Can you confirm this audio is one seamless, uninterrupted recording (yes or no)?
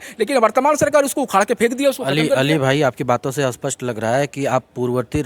yes